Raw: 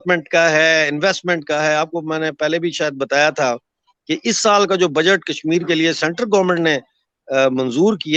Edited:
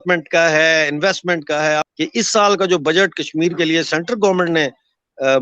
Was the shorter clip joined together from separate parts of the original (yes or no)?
yes